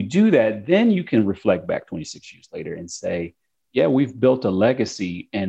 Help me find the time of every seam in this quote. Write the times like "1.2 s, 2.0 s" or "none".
none